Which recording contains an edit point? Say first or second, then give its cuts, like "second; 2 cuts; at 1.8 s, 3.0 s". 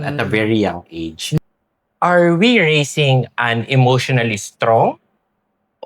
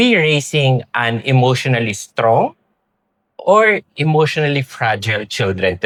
first; 1 cut; at 1.4 s